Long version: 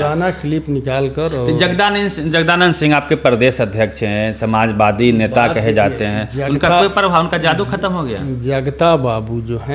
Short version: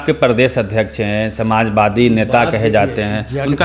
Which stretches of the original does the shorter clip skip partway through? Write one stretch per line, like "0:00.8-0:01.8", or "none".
none

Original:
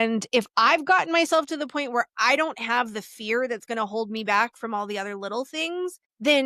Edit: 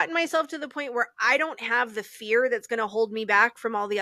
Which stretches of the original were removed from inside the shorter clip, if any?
none

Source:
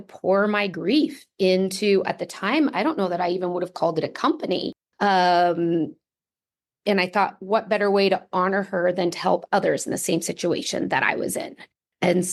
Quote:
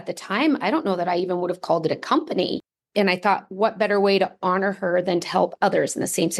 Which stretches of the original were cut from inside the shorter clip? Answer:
0:04.8-0:06.6

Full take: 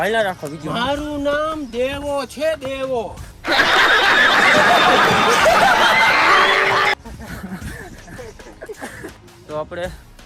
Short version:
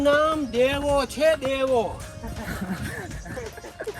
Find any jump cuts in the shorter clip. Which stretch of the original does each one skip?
0:03.4-0:07.0

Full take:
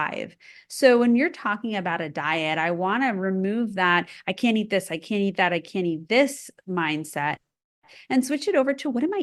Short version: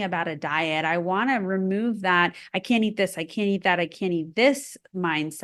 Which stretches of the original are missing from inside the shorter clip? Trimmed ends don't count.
none

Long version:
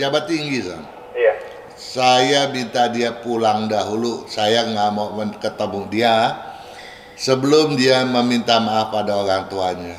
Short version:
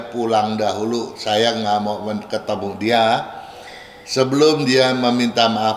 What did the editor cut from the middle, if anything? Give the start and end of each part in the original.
none

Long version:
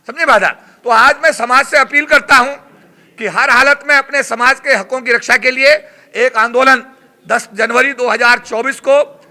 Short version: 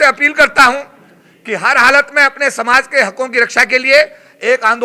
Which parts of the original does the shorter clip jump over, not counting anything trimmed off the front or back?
none

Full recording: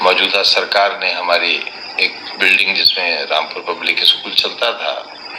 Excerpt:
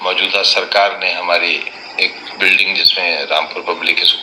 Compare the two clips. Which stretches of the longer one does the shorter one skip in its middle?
none

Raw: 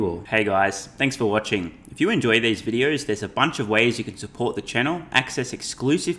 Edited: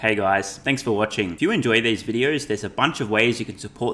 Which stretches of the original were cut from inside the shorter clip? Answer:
0:01.2-0:01.5

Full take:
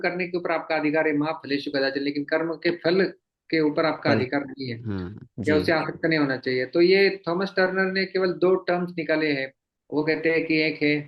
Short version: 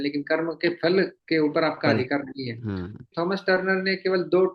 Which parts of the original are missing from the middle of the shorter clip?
0:03.2-0:03.4
0:05.3-0:07.2

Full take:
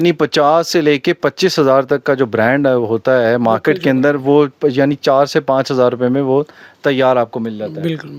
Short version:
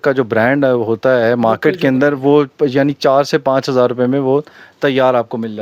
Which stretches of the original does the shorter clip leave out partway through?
none

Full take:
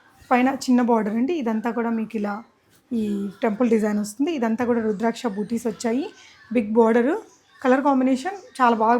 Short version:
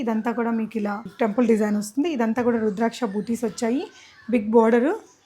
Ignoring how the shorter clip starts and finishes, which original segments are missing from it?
0:02.5-0:03.3

